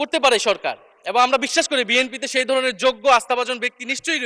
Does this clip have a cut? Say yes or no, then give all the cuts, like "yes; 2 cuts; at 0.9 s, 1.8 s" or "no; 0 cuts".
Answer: no; 0 cuts